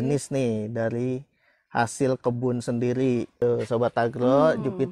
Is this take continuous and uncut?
no; 1 cut; at 3.3 s

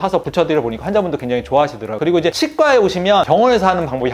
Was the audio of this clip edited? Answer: yes; 1 cut; at 2.0 s

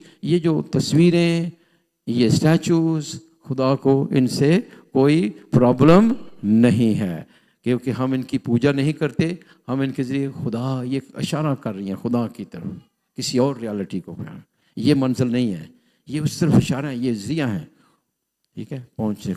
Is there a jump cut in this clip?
no; 0 cuts

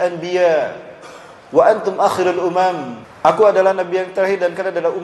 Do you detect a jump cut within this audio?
yes; 1 cut; at 3.3 s

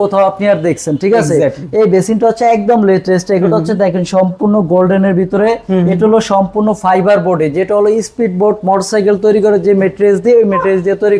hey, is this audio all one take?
yes; 0 cuts

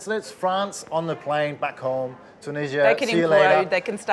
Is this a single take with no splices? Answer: yes; 0 cuts

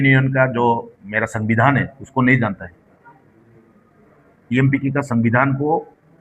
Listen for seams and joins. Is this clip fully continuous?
yes; 0 cuts

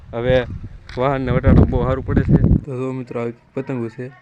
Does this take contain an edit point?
yes; 1 cut; at 2.6 s

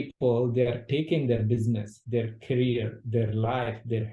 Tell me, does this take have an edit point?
yes; 1 cut; at 1.9 s

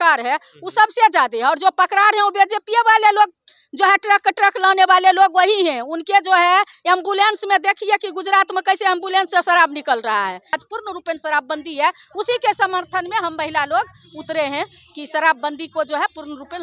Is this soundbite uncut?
no; 1 cut; at 10.6 s

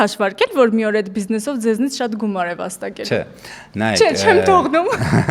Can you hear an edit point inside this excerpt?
no; 0 cuts

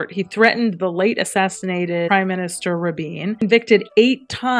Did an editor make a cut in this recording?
yes; 2 cuts; at 2.1 s, 3.4 s

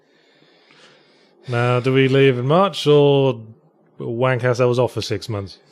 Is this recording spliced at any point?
no; 0 cuts

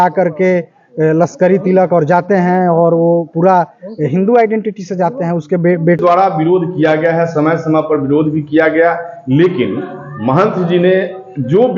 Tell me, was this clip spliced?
yes; 1 cut; at 6.0 s

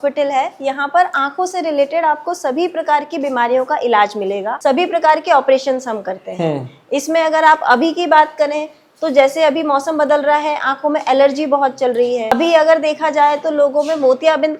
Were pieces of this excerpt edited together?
no; 0 cuts

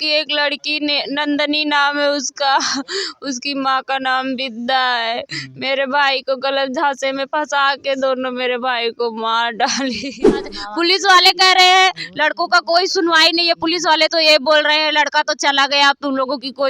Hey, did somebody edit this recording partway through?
yes; 1 cut; at 10.4 s

